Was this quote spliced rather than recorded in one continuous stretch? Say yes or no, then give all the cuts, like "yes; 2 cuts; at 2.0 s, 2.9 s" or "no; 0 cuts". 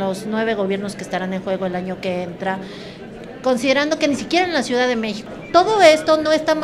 yes; 1 cut; at 5.2 s